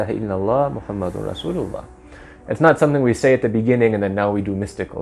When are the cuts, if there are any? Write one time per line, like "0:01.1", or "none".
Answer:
none